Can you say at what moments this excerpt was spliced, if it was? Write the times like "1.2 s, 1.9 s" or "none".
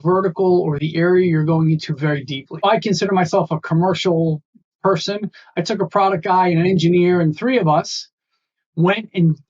2.6 s